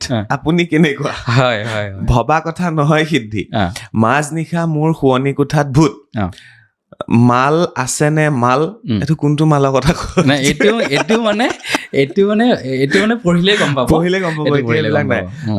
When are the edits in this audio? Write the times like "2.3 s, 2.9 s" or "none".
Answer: none